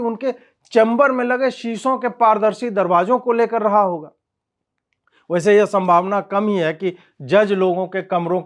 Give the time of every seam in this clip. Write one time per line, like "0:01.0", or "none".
none

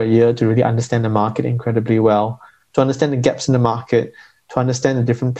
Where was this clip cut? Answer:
none

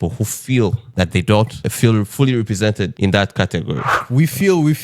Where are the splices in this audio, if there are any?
0:00.8
0:01.6
0:02.9
0:04.0

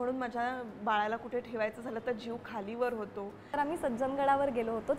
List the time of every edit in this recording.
0:03.5

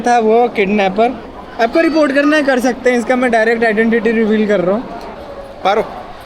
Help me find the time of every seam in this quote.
0:05.1

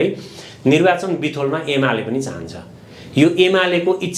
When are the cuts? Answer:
none

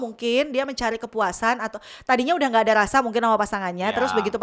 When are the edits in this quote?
none

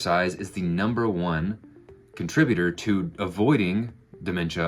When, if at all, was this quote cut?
none

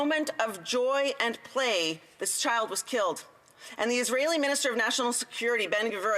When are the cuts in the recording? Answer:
none

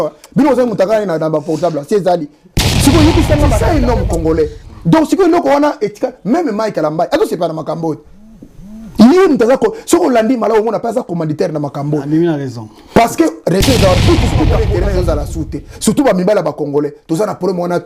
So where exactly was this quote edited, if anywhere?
0:03.6
0:14.6

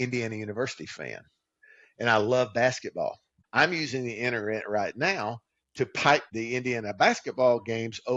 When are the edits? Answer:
0:03.3
0:06.3

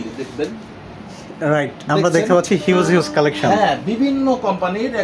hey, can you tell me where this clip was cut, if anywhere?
none

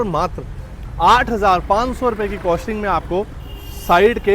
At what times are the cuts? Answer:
none

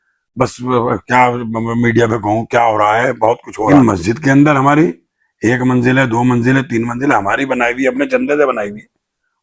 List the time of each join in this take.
0:03.7

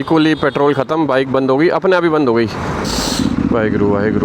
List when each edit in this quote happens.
0:02.9

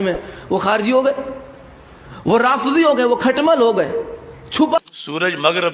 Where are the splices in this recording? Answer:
0:04.8

